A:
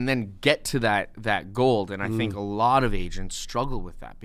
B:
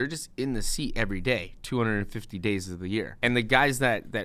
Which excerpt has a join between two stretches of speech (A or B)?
B